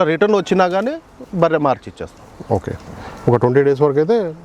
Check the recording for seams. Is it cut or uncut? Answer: uncut